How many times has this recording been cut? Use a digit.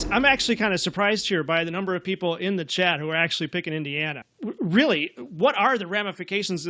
1